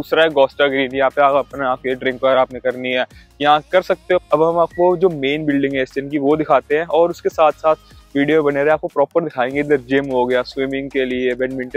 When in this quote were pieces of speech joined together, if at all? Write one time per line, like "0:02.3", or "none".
0:04.2